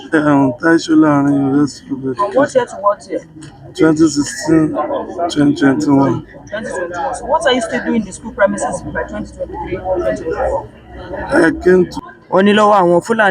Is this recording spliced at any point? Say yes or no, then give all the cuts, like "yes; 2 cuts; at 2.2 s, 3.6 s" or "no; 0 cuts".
yes; 1 cut; at 12.0 s